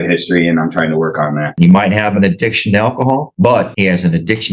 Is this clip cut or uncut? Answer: cut